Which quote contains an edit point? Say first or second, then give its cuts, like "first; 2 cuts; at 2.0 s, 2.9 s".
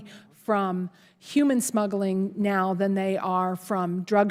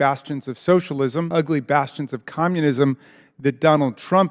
second; 1 cut; at 1.3 s